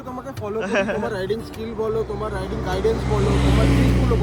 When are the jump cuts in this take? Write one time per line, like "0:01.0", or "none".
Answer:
none